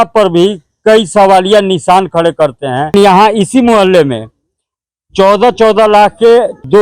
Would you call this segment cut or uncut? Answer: cut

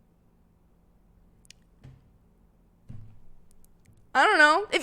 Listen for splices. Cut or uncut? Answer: cut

